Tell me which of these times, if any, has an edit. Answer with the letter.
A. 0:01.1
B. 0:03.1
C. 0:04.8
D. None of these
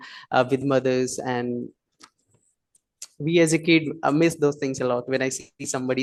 D